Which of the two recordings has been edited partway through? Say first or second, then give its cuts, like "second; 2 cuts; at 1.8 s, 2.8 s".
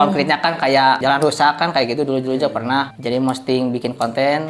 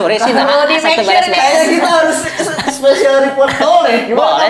first; 1 cut; at 1.0 s